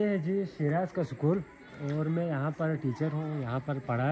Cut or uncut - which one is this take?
uncut